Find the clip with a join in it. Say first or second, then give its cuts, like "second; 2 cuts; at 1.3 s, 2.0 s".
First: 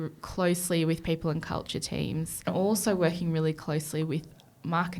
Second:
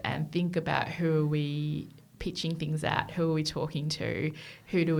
first; 1 cut; at 2.5 s